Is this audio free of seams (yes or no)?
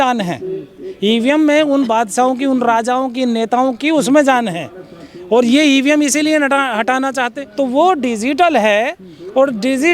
no